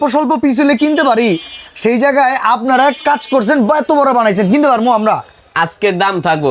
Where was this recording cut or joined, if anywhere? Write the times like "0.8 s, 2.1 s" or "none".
none